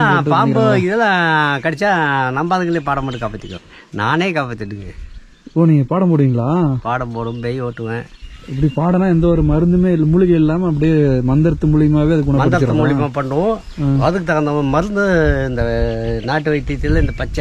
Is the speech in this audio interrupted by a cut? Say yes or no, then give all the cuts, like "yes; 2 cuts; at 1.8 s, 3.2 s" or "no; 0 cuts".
yes; 2 cuts; at 3.5 s, 8.2 s